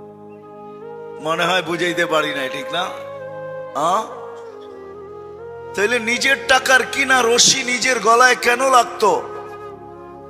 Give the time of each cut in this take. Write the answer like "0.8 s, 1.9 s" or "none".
4.2 s, 5.8 s